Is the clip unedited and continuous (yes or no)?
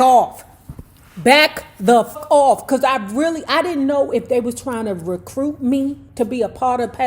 no